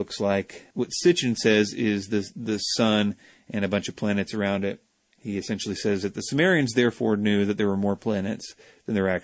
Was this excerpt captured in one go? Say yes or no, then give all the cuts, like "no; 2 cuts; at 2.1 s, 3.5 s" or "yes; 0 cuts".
no; 1 cut; at 3.9 s